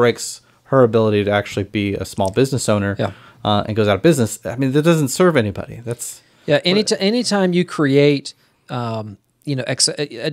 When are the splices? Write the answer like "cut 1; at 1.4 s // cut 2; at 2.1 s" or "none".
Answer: none